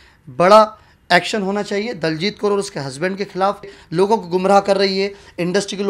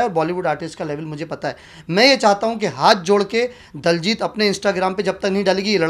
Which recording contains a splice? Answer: first; 1 cut; at 3.7 s

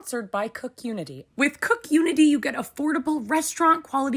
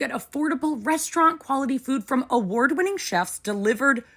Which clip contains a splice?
first; 1 cut; at 1.2 s

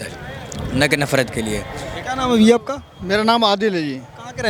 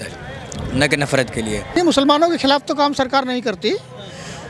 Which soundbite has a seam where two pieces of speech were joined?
second; 1 cut; at 1.8 s

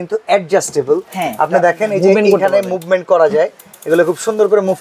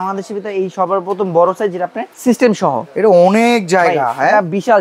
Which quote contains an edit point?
second; 1 cut; at 2.0 s

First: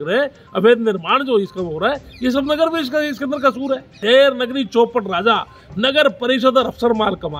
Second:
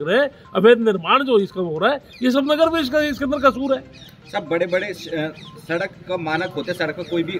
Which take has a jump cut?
first; 1 cut; at 4.0 s

